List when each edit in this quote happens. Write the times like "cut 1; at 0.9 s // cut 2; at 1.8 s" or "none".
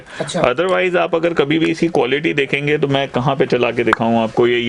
none